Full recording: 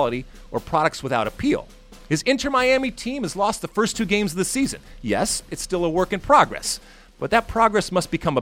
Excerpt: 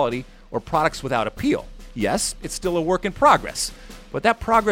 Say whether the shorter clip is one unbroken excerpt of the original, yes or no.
no